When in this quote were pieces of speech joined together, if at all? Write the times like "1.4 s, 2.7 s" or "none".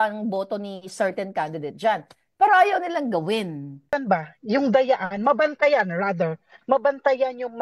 3.9 s